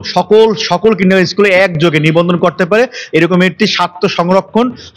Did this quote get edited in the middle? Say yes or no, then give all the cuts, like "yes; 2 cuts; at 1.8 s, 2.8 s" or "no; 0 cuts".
no; 0 cuts